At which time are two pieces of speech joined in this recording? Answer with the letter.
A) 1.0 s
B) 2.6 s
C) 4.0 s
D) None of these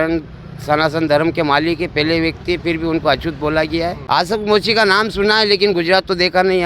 C